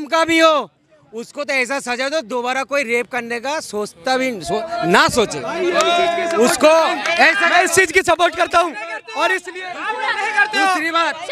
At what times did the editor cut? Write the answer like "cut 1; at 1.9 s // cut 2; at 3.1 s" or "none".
none